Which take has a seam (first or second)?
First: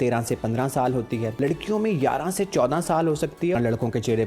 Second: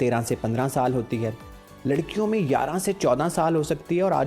first